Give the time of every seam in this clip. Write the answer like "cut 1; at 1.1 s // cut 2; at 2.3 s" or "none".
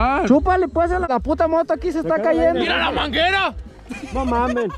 cut 1; at 1.0 s